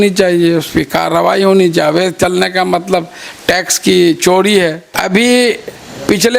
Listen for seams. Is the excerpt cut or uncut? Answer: cut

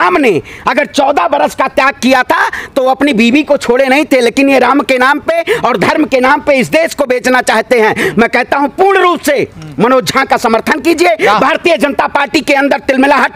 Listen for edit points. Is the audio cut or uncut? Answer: uncut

